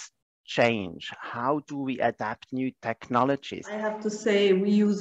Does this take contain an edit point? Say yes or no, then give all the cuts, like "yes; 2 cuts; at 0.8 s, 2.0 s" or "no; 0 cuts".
yes; 1 cut; at 3.9 s